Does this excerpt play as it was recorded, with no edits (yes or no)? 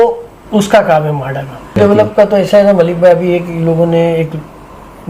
no